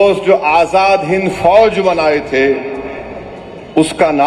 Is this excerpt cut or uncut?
uncut